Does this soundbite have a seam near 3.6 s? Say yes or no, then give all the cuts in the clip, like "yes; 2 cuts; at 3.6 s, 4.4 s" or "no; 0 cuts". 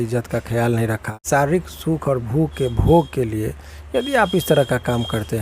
no; 1 cut; at 1.2 s